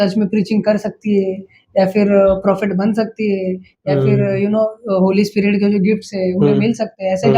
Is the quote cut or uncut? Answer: uncut